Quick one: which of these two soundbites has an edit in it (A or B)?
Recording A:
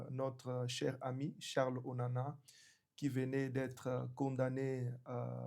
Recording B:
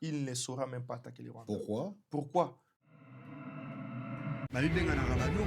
B